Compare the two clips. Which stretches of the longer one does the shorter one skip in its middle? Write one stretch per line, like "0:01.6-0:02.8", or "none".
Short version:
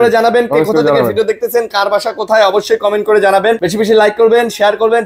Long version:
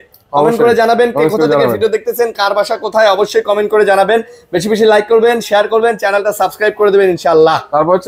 0:04.3-0:04.6